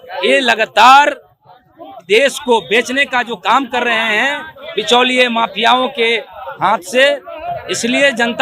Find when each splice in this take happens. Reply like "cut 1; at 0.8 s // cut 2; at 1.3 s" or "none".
none